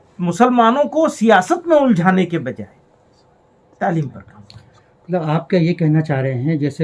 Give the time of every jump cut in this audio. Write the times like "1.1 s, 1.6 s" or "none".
none